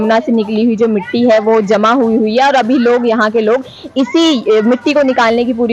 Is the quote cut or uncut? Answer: uncut